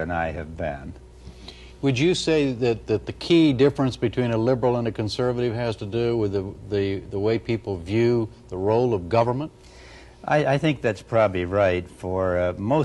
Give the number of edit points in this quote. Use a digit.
1